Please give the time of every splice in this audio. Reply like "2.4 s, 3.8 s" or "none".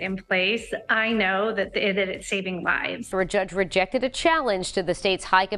3.0 s